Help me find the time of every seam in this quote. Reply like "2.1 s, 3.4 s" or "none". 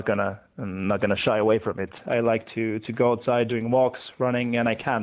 2.0 s, 3.5 s